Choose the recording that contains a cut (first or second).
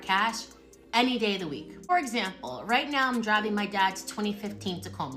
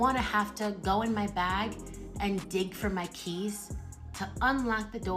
first